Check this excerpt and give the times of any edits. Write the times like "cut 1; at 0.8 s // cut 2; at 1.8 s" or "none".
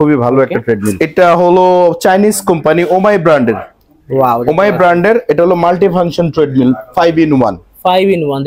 cut 1; at 0.9 s